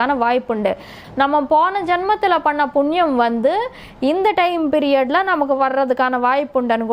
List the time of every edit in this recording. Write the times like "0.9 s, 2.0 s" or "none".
1.0 s